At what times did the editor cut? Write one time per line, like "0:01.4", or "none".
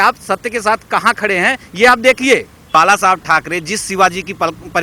0:02.7

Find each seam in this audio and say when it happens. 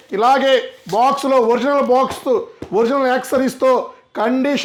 none

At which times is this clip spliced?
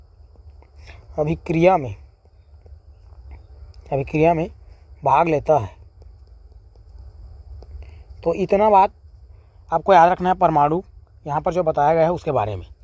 none

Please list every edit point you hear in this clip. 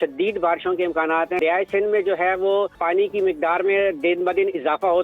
0:01.4
0:02.8

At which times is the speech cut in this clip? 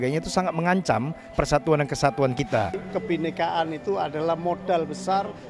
0:02.3

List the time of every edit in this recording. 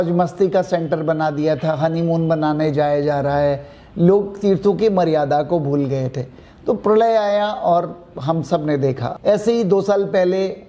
0:09.1

